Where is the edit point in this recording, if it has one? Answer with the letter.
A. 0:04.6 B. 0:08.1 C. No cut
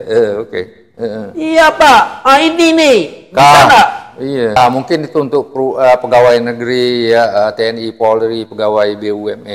A